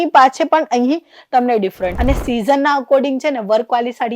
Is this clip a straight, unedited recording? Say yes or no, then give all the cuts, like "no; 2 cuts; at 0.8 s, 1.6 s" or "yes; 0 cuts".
no; 1 cut; at 1.9 s